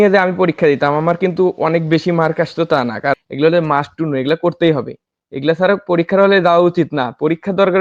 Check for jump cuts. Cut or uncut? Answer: cut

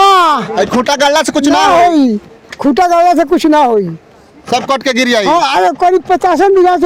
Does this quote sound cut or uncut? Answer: uncut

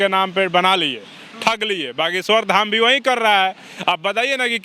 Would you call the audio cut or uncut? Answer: uncut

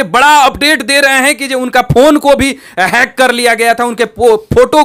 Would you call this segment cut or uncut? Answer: uncut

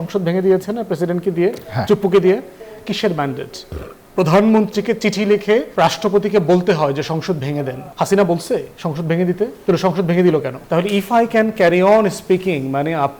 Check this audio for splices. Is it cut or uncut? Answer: cut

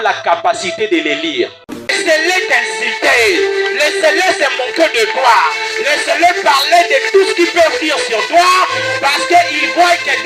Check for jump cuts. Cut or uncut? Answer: cut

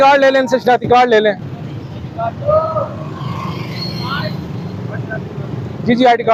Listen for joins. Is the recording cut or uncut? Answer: uncut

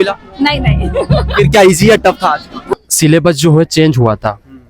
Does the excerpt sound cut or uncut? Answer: cut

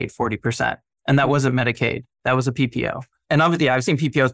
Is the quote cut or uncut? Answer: uncut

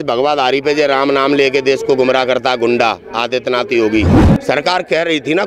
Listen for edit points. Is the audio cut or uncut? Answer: cut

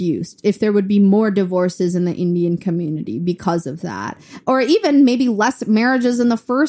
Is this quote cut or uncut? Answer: uncut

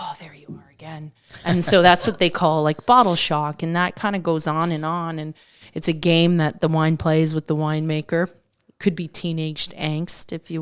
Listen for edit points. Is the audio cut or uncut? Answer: uncut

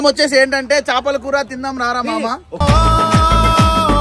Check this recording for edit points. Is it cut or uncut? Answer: uncut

